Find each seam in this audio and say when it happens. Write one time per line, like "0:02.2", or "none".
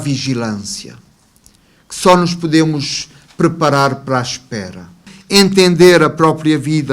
0:05.1